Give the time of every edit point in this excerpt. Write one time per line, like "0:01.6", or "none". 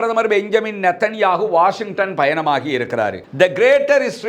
0:03.3